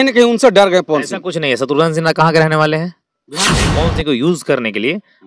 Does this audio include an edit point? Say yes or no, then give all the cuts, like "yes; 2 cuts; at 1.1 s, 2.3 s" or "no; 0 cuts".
yes; 1 cut; at 3.6 s